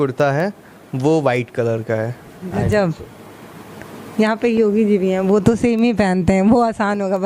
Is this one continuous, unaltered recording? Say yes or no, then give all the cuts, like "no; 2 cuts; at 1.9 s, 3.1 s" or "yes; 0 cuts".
yes; 0 cuts